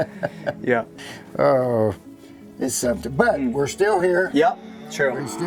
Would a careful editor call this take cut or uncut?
uncut